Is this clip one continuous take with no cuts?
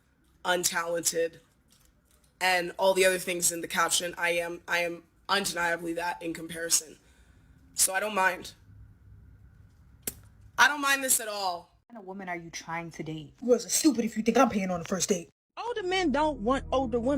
no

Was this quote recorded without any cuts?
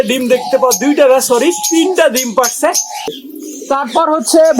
no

